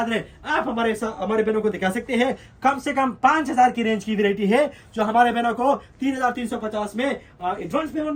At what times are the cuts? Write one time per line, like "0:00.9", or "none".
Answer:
none